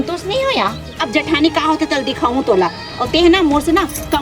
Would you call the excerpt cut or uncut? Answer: cut